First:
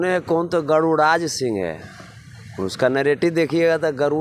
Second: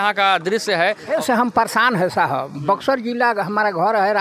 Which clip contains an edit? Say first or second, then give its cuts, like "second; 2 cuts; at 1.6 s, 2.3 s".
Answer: second; 1 cut; at 1.2 s